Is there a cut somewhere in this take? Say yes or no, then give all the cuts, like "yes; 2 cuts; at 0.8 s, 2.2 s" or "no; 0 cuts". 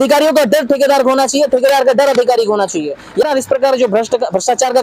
yes; 1 cut; at 3.3 s